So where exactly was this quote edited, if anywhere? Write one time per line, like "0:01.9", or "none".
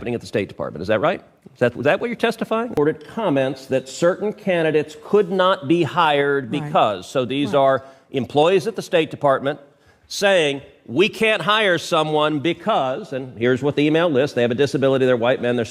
0:02.8